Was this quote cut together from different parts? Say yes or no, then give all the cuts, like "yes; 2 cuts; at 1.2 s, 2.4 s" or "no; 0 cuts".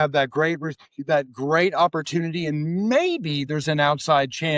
no; 0 cuts